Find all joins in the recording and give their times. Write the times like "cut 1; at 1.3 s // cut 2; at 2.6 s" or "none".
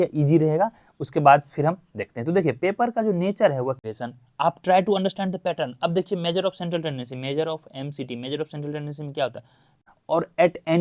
cut 1; at 3.9 s // cut 2; at 9.8 s